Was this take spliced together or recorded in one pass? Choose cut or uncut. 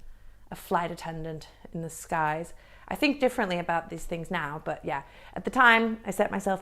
uncut